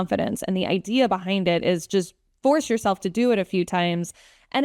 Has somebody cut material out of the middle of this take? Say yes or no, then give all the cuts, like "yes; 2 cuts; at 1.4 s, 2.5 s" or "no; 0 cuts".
no; 0 cuts